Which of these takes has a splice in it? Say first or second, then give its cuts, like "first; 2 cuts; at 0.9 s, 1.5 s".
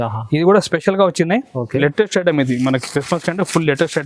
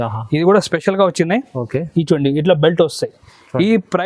first; 1 cut; at 1.8 s